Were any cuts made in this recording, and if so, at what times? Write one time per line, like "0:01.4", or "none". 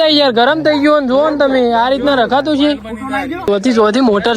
0:03.4

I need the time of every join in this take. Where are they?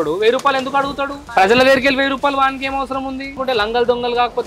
0:03.3

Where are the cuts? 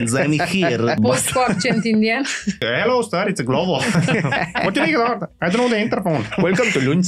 0:01.0
0:02.6

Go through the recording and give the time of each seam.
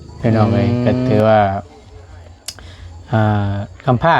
0:01.1

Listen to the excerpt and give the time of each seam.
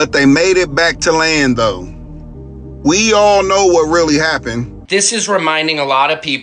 0:04.8

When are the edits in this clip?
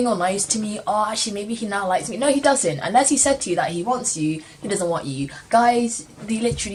none

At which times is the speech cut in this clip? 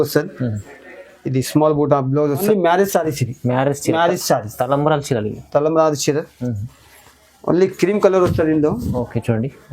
0:02.4

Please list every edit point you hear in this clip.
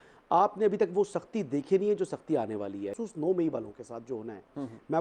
0:02.9

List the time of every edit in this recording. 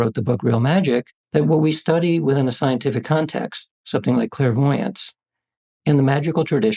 0:01.2

